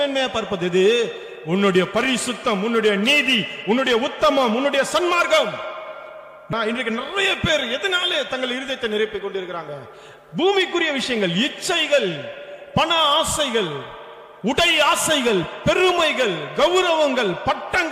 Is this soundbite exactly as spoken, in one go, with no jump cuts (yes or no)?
no